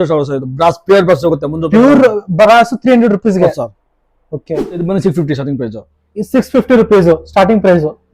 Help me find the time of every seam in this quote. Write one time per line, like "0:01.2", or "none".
0:04.8